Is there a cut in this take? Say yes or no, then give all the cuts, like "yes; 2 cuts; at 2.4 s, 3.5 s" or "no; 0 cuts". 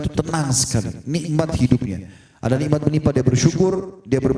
no; 0 cuts